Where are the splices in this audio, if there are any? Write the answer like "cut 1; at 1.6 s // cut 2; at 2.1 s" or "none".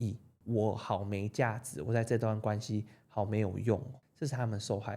cut 1; at 4.0 s